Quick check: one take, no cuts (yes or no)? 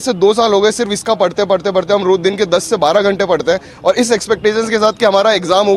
yes